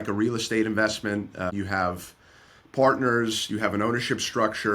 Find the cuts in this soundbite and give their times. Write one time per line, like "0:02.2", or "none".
0:01.5